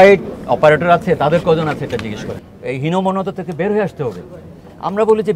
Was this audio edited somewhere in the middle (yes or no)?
yes